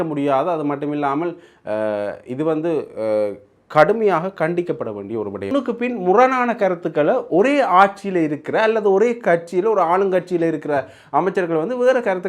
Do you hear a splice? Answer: yes; 1 cut; at 5.5 s

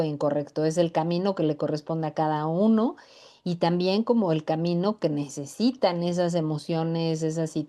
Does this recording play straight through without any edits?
yes; 0 cuts

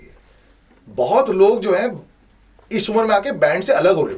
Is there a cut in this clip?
no; 0 cuts

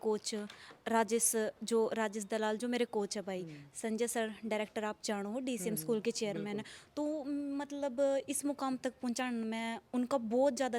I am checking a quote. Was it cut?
no; 0 cuts

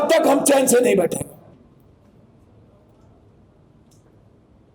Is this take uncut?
no; 1 cut; at 1.5 s

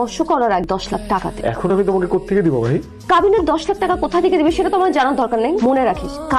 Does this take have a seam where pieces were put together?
yes; 1 cut; at 1.0 s

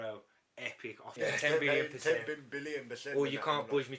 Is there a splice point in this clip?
yes; 1 cut; at 1.1 s

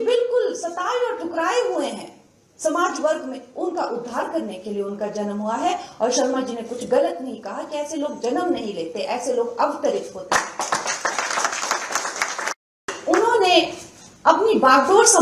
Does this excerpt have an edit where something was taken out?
yes; 1 cut; at 12.9 s

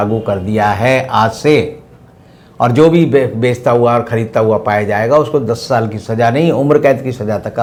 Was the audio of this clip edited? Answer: no; 0 cuts

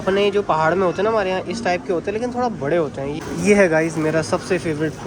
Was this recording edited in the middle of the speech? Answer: yes; 1 cut; at 3.2 s

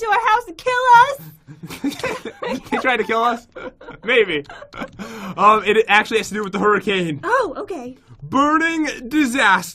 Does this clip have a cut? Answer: yes; 1 cut; at 6.3 s

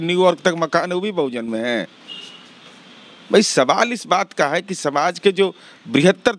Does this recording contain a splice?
no; 0 cuts

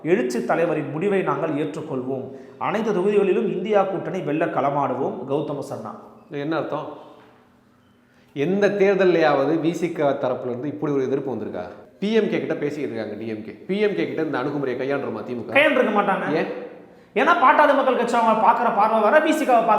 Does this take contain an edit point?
yes; 1 cut; at 11.8 s

